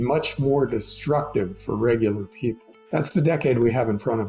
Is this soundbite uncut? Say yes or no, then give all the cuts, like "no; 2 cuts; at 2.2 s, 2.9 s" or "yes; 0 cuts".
no; 1 cut; at 2.7 s